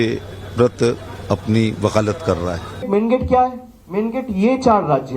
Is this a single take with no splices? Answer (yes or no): no